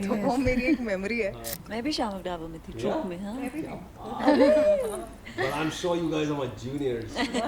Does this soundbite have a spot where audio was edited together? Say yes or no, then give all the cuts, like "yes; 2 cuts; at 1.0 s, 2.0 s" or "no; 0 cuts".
yes; 1 cut; at 1.5 s